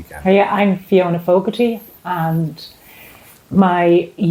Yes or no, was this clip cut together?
no